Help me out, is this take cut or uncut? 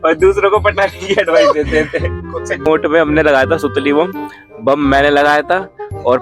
cut